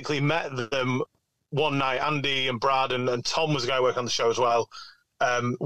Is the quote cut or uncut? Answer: uncut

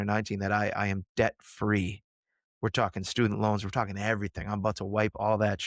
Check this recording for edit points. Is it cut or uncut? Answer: uncut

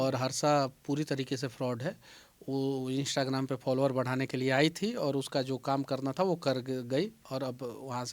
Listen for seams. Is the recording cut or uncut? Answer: uncut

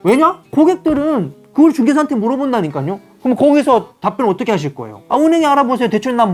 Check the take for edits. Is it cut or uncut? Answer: cut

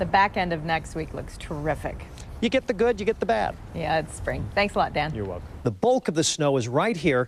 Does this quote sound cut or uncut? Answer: cut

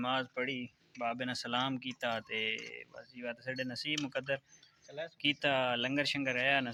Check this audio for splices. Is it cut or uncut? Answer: uncut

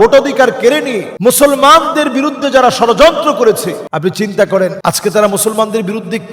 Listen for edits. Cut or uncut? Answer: cut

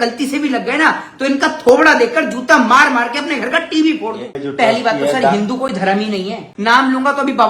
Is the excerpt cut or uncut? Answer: cut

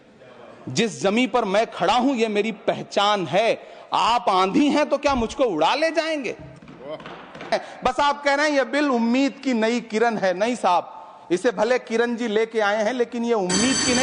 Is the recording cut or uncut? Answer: cut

